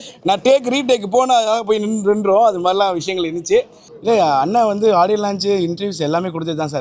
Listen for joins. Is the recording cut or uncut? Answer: cut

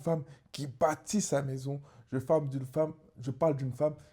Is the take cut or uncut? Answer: uncut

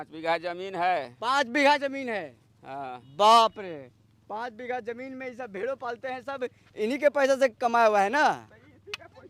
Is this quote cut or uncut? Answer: uncut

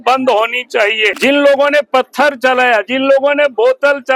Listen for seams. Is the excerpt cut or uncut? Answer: cut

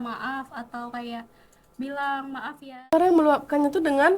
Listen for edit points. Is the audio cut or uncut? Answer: cut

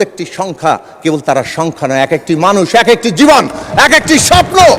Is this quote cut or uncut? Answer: uncut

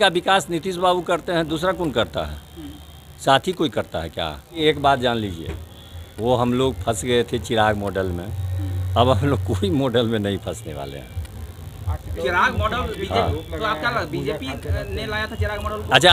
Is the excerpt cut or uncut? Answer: uncut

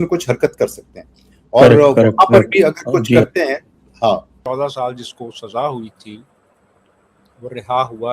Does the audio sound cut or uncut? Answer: cut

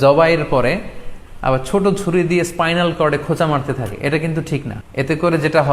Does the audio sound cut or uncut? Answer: cut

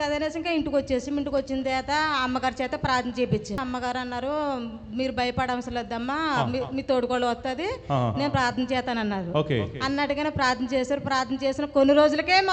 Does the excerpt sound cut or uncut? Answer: cut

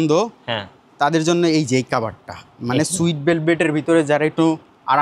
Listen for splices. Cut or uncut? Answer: uncut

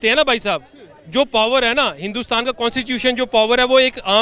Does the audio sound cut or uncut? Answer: uncut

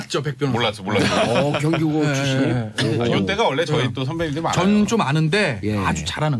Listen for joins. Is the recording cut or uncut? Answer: cut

